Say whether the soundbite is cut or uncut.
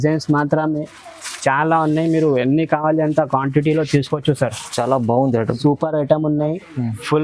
cut